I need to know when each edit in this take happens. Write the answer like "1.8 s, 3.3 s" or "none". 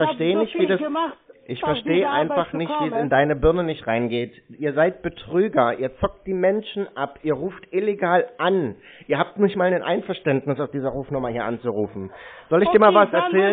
none